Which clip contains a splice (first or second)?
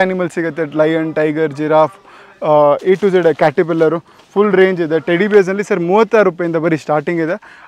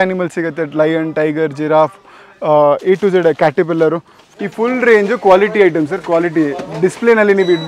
second